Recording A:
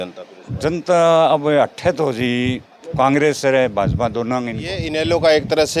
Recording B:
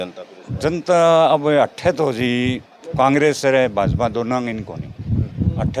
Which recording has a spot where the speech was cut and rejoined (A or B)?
A